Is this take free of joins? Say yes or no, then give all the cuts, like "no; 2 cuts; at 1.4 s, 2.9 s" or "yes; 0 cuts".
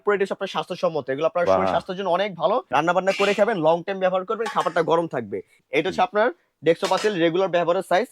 no; 2 cuts; at 2.7 s, 5.6 s